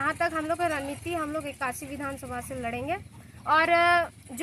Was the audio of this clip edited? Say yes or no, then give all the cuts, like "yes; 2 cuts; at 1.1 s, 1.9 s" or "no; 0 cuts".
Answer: no; 0 cuts